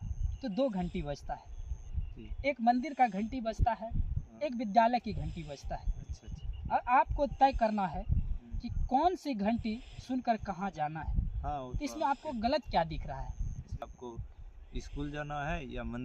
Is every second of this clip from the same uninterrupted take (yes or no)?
no